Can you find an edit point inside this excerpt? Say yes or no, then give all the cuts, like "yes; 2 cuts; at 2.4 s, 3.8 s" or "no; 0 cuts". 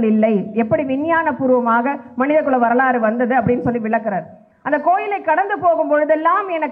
no; 0 cuts